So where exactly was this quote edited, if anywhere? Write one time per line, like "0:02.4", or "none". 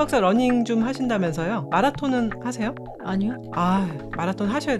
0:01.6
0:03.1